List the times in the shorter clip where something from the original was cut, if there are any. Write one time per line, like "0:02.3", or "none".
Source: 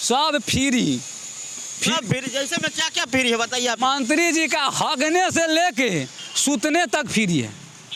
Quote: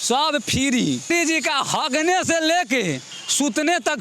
0:01.1